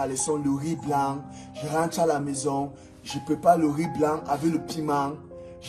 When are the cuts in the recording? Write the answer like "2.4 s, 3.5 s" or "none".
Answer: none